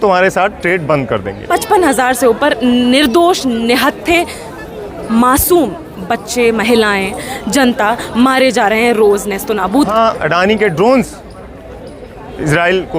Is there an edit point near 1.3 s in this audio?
yes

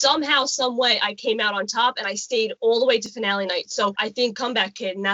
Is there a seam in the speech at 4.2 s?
yes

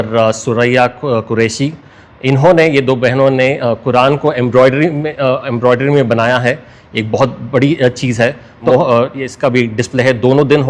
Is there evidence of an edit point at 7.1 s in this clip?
no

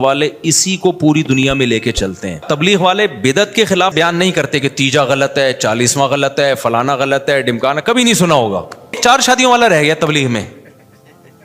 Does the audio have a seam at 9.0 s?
yes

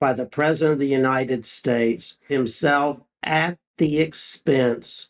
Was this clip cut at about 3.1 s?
yes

